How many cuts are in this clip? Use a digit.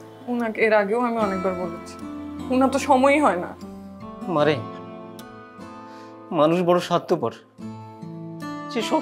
1